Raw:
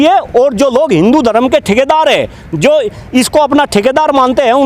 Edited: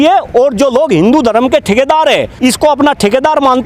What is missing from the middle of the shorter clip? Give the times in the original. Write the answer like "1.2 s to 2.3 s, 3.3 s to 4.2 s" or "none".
2.3 s to 3.0 s